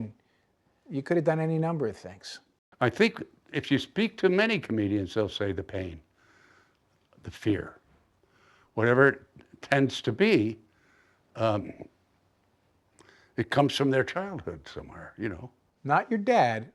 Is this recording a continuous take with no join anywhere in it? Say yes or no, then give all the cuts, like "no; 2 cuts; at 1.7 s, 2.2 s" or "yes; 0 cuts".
no; 1 cut; at 2.5 s